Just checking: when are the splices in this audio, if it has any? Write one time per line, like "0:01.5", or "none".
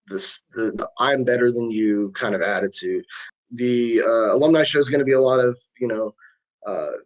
0:03.2